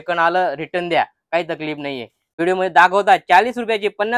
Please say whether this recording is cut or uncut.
cut